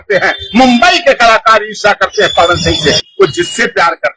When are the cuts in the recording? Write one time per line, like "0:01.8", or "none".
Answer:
0:03.0